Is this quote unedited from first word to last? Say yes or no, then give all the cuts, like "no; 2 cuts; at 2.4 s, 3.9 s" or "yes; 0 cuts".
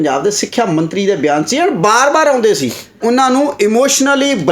no; 1 cut; at 3.0 s